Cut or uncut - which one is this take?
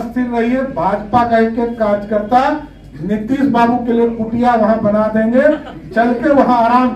uncut